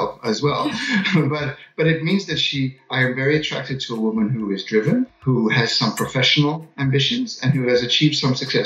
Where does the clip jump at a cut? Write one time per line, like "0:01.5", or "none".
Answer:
0:05.2